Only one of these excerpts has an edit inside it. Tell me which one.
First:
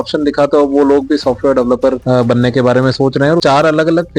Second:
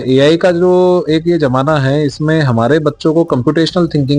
first; 2 cuts; at 2.0 s, 3.4 s

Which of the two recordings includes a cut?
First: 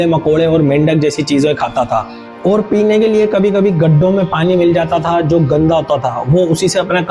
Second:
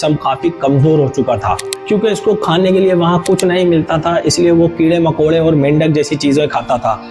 second; 1 cut; at 1.7 s

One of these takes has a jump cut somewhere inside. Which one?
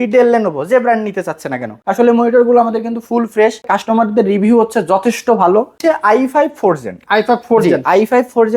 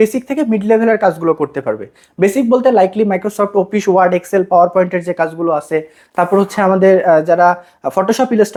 first; 3 cuts; at 1.8 s, 3.7 s, 5.8 s

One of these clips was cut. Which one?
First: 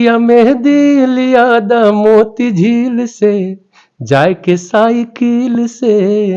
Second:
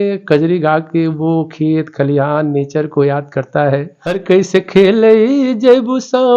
second; 1 cut; at 4.2 s

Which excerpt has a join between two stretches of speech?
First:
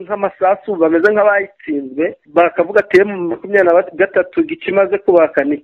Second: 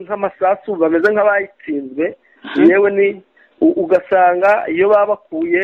first; 1 cut; at 2.2 s

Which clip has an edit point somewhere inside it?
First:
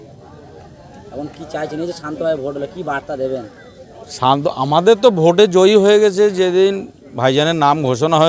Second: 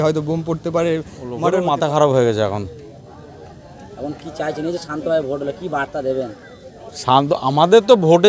second; 1 cut; at 1.3 s

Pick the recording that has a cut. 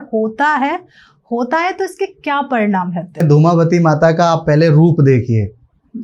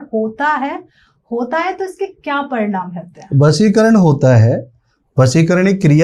first; 1 cut; at 3.2 s

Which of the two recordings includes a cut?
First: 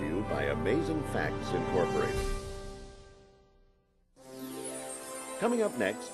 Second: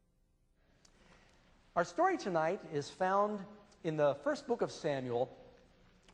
second; 1 cut; at 2.6 s

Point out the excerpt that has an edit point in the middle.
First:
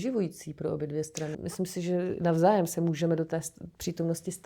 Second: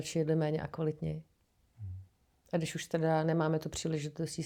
first; 1 cut; at 1.4 s

